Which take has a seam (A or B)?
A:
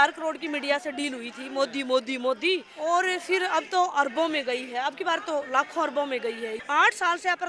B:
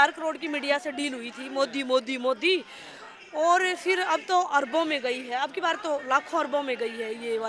A